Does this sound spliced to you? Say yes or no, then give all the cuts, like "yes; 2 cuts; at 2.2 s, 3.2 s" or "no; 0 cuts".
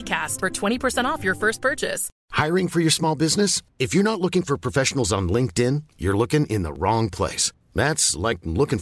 yes; 1 cut; at 2.1 s